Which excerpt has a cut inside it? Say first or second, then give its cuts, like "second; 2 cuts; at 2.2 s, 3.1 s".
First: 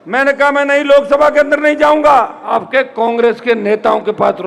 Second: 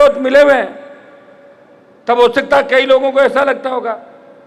first; 1 cut; at 2.4 s